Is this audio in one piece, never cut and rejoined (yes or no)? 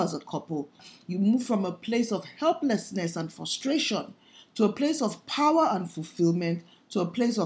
no